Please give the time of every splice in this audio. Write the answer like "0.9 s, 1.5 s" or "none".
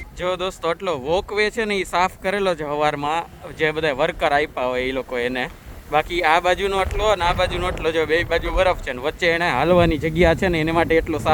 none